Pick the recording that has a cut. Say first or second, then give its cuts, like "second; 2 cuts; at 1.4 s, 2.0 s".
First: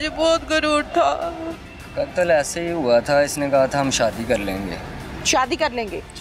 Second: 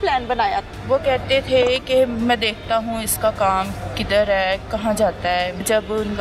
first; 1 cut; at 1.5 s